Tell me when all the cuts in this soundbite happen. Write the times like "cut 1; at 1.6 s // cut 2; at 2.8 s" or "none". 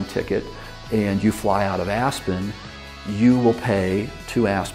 none